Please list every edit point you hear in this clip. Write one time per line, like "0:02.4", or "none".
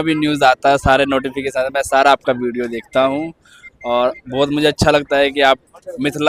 none

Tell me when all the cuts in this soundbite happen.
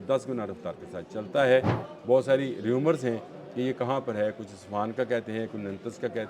0:01.9

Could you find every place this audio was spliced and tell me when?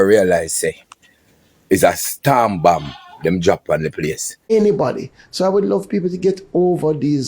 0:04.5

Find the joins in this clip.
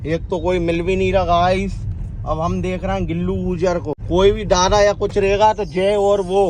0:04.0

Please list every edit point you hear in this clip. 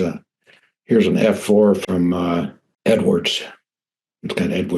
0:02.6

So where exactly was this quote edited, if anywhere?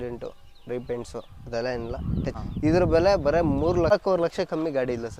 0:02.3
0:03.9

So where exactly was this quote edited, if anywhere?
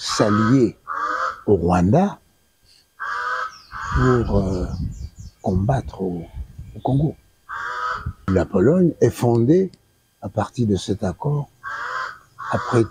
0:08.1

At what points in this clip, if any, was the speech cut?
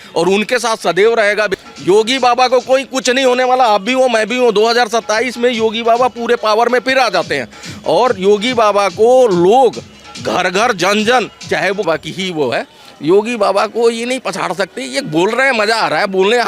0:01.6
0:11.9

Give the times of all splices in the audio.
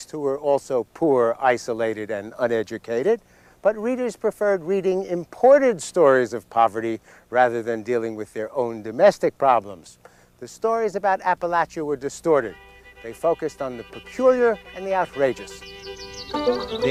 none

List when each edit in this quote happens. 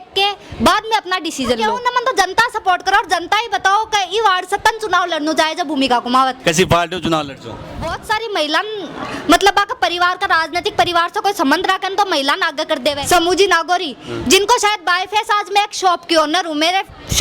0:01.6
0:07.9
0:13.0

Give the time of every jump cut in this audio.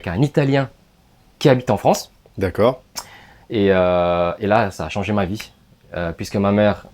none

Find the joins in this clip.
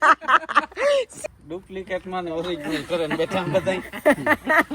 0:01.2

